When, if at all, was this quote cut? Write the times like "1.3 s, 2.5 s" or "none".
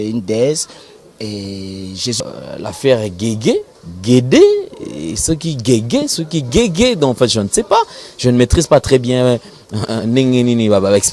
2.2 s